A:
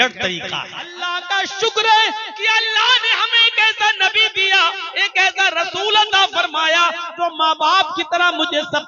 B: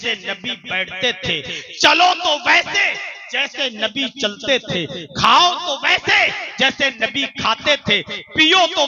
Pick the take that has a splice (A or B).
A